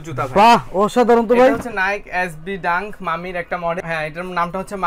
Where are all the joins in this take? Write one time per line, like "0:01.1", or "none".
none